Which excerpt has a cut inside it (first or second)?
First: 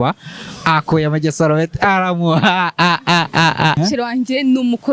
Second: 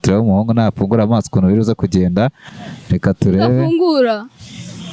first